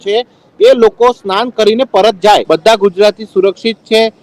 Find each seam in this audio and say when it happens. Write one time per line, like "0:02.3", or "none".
0:02.4

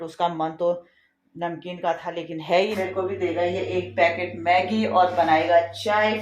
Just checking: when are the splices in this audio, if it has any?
0:02.8

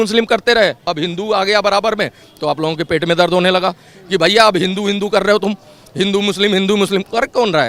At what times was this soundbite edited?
none

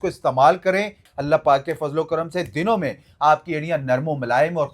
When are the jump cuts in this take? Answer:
0:01.1

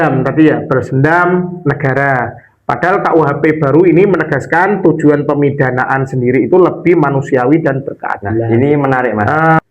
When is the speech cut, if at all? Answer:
0:08.5

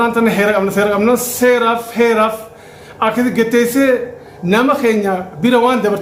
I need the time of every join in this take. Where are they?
none

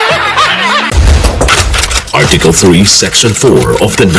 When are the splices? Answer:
0:00.9

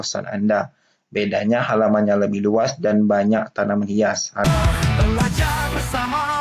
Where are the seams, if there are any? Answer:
0:04.4

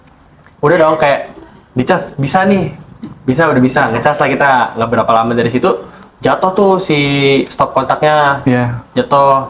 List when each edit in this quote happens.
0:08.4

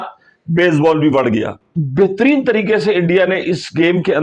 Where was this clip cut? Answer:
0:01.6

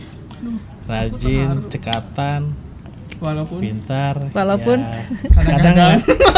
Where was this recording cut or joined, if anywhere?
none

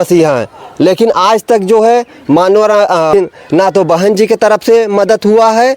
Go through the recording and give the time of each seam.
0:03.1

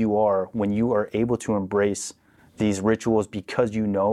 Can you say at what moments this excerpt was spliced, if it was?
none

